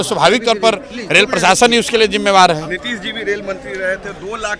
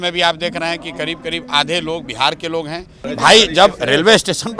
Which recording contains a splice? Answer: second; 1 cut; at 3.1 s

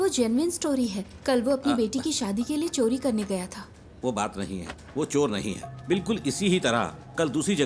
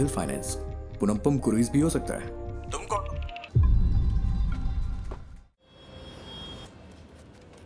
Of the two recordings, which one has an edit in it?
second; 2 cuts; at 3.3 s, 5.6 s

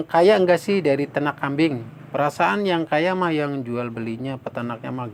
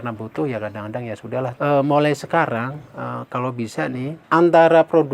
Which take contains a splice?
second; 2 cuts; at 1.5 s, 4.2 s

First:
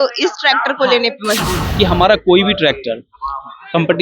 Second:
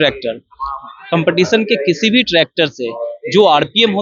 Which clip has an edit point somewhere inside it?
first; 1 cut; at 1.6 s

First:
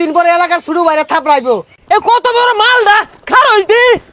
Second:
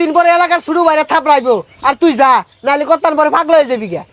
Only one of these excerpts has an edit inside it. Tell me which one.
first; 1 cut; at 1.7 s

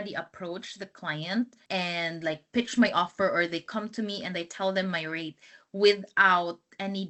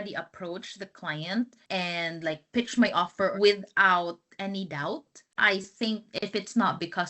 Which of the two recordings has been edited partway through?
second; 2 cuts; at 3.3 s, 5.3 s

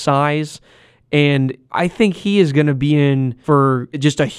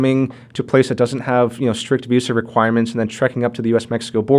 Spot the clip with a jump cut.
first; 2 cuts; at 1.6 s, 3.3 s

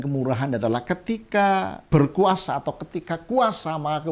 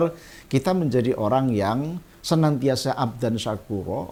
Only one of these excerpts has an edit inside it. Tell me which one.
first; 1 cut; at 1.8 s

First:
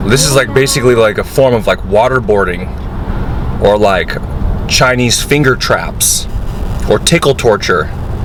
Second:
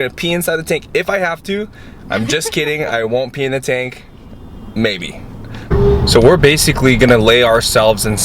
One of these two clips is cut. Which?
second; 1 cut; at 5.7 s

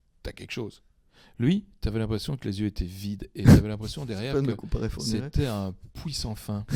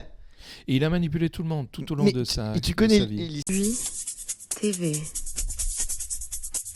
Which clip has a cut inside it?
second; 1 cut; at 3.4 s

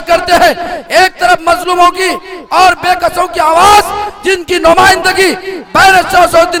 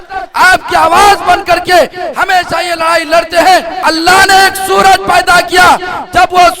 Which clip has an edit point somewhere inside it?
second; 1 cut; at 3.8 s

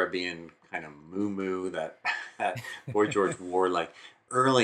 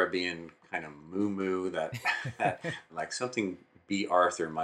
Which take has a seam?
second; 1 cut; at 2.9 s

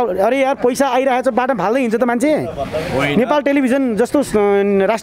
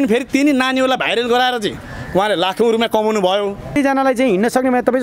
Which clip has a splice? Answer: second; 1 cut; at 3.8 s

